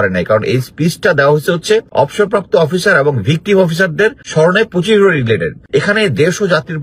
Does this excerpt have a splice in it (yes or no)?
yes